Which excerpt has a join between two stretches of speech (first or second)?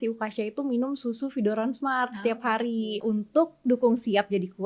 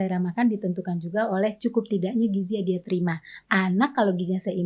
first